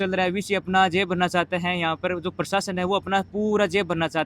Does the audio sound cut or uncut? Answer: uncut